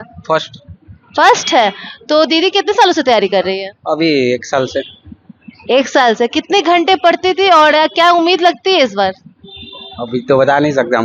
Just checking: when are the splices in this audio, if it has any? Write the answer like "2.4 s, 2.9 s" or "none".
none